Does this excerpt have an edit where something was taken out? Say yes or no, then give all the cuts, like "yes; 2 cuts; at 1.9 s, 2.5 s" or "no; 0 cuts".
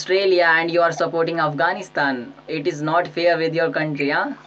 no; 0 cuts